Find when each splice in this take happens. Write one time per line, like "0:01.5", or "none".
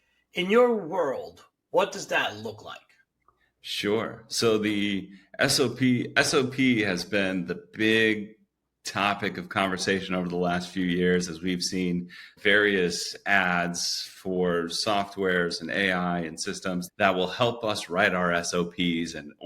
0:16.9